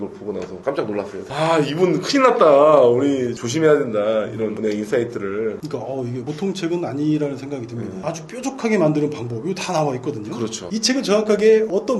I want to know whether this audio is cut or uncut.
cut